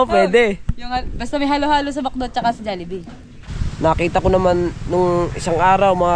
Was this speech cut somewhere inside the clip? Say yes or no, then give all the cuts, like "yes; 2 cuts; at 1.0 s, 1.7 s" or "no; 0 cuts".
yes; 1 cut; at 3.3 s